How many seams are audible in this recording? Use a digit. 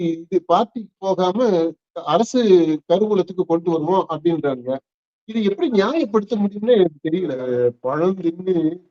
1